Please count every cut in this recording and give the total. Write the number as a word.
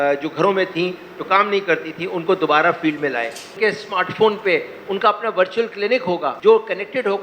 two